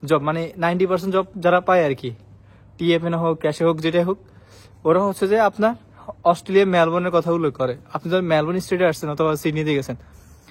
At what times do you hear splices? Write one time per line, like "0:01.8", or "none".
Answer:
none